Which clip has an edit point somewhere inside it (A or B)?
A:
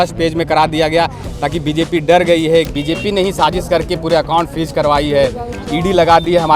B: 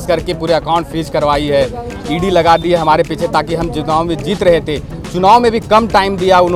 A